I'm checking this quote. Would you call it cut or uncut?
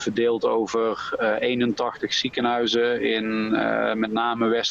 uncut